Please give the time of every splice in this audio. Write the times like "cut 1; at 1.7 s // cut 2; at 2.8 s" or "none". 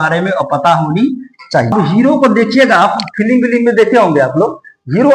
cut 1; at 1.7 s